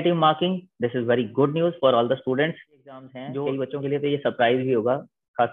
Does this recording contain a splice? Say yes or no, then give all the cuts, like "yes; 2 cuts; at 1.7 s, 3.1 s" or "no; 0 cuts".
yes; 1 cut; at 3.2 s